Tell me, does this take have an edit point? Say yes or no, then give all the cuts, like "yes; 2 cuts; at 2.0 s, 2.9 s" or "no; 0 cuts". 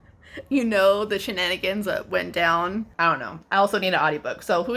yes; 1 cut; at 2.9 s